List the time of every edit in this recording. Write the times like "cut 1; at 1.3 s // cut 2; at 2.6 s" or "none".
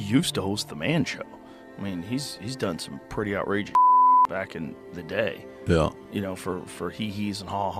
none